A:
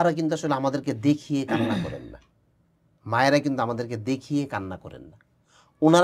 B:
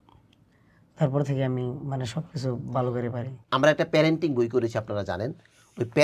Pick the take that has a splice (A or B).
B